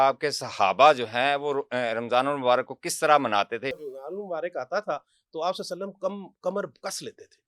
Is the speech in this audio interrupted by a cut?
yes; 1 cut; at 3.8 s

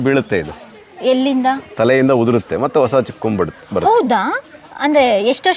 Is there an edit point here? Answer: no; 0 cuts

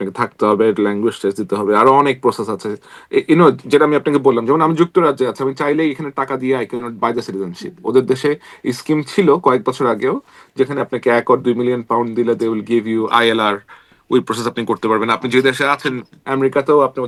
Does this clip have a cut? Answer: no; 0 cuts

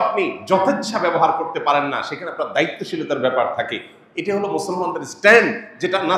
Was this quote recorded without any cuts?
yes; 0 cuts

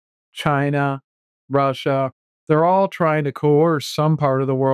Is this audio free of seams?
no; 1 cut; at 2.3 s

